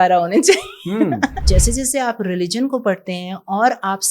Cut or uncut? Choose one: cut